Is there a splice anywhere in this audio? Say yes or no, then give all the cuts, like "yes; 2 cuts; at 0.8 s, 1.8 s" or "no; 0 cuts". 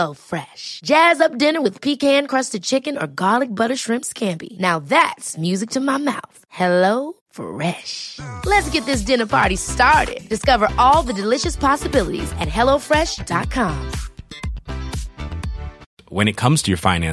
no; 0 cuts